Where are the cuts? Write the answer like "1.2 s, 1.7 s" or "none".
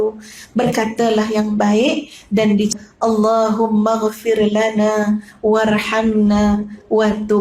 2.7 s